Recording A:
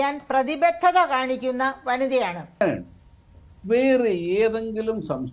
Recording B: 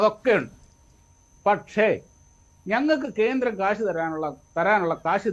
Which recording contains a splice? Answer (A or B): A